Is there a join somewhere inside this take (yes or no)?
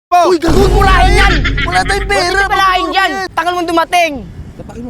yes